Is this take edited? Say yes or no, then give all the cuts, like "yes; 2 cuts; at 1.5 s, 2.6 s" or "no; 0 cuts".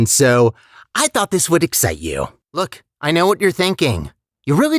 yes; 1 cut; at 2.4 s